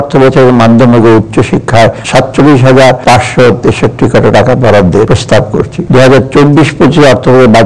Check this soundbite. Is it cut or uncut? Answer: cut